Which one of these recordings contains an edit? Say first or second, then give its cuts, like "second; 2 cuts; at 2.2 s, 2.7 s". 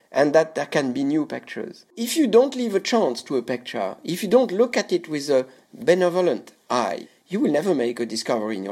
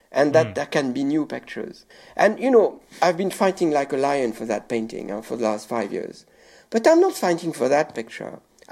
first; 3 cuts; at 2.0 s, 5.6 s, 7.0 s